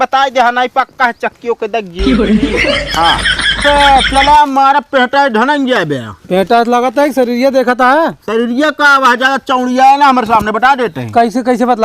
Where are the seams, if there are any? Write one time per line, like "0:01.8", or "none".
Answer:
0:03.6